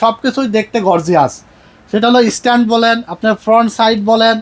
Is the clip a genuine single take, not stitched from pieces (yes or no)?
yes